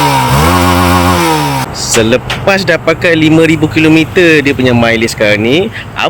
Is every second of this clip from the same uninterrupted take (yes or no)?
no